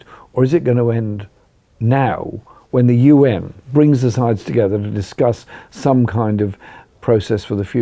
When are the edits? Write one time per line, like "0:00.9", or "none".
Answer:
0:03.5